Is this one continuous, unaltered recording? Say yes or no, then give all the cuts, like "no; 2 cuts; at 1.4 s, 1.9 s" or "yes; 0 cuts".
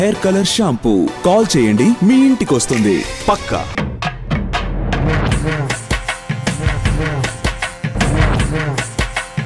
no; 1 cut; at 3.7 s